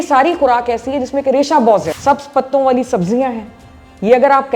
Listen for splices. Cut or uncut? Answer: cut